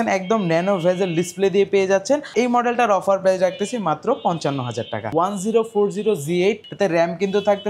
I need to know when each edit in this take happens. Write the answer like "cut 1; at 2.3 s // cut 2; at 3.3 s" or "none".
cut 1; at 2.3 s // cut 2; at 5.1 s // cut 3; at 6.7 s